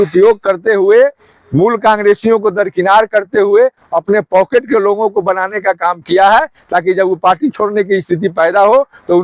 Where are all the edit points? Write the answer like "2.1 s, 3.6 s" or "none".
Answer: none